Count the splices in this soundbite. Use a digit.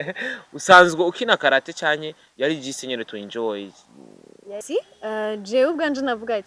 1